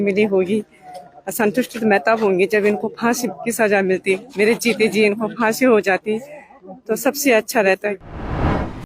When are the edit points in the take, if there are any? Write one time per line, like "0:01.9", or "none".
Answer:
0:08.0